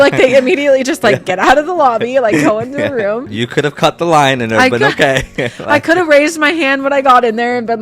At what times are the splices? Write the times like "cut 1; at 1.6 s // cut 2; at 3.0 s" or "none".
cut 1; at 3.3 s